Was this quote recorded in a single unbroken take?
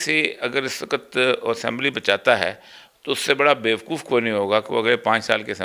yes; 0 cuts

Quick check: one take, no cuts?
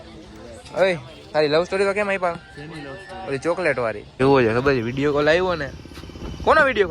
no; 1 cut; at 4.1 s

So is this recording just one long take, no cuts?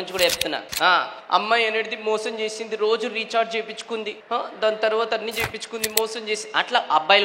no; 2 cuts; at 0.9 s, 4.1 s

